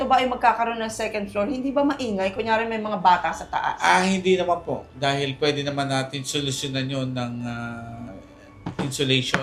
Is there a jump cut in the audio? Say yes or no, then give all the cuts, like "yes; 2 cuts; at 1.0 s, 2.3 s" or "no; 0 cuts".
no; 0 cuts